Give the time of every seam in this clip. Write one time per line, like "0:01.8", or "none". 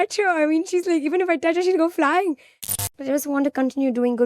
0:02.8